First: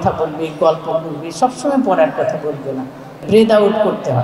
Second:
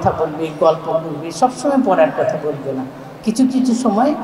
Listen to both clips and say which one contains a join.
first; 1 cut; at 3.1 s

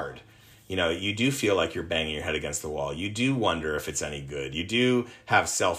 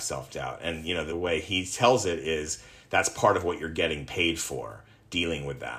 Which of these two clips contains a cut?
second; 1 cut; at 1.1 s

